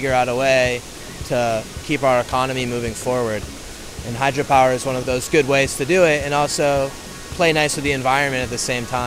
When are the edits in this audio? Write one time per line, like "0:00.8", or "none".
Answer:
0:01.7
0:05.0